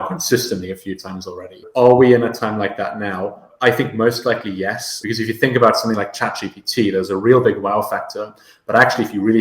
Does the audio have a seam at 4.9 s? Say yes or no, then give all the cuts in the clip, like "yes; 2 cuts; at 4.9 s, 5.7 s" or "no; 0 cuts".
yes; 3 cuts; at 1.6 s, 3.5 s, 4.9 s